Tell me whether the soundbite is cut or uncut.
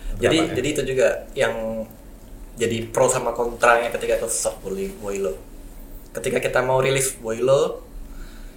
uncut